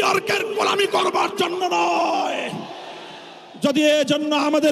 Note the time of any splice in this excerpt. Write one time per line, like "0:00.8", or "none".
0:03.7